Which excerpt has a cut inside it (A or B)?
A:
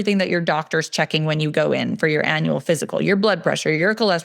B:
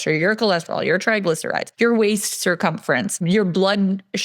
B